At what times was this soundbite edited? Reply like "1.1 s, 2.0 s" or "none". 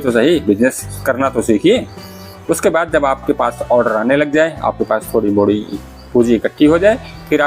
0.9 s